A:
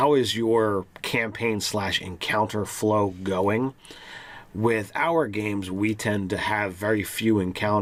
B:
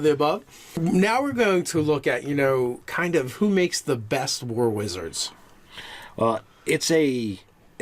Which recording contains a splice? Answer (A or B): B